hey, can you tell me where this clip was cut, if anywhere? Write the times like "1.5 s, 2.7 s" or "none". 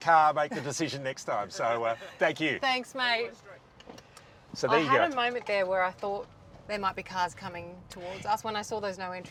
none

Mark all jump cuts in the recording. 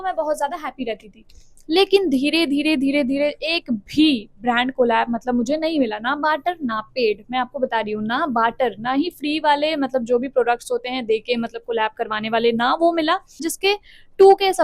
13.5 s

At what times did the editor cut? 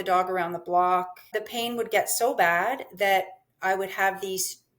1.4 s

